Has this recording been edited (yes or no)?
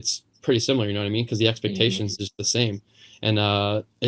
no